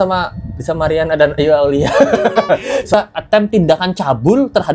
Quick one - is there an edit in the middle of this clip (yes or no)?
yes